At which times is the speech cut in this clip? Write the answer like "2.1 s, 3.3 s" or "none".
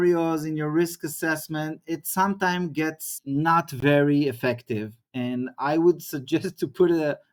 none